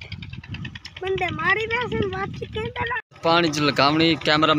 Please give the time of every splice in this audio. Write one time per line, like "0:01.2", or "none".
0:03.1